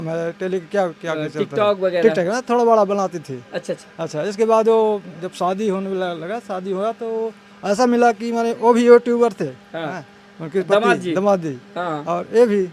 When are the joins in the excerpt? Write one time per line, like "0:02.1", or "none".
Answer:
none